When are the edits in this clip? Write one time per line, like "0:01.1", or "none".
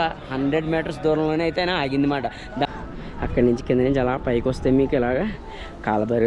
0:02.7